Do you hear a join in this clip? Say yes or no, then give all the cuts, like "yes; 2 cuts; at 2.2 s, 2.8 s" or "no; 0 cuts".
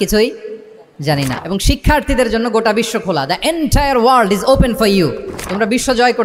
yes; 1 cut; at 1.3 s